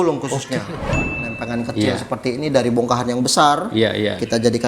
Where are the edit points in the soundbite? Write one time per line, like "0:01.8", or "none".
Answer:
0:01.2

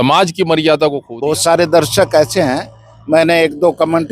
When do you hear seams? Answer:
0:01.1

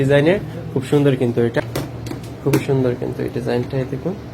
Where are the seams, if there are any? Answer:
0:01.6

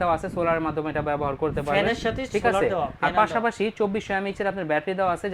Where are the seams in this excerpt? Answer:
none

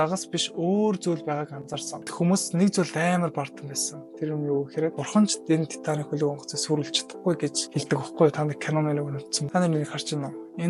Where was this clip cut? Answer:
0:02.0
0:09.3

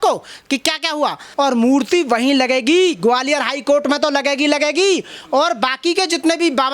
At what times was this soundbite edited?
0:01.2

